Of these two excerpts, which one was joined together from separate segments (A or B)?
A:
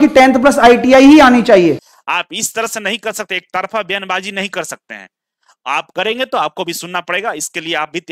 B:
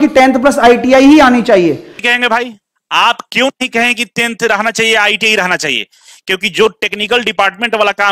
A